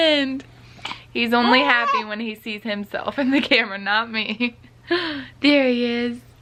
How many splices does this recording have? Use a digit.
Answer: 0